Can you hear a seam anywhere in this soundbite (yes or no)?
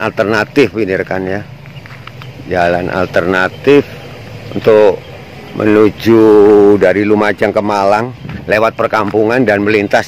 no